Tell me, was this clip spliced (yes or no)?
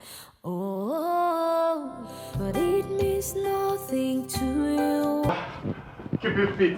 yes